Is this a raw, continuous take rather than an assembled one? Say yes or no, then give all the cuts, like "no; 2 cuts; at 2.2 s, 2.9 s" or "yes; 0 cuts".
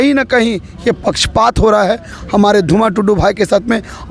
yes; 0 cuts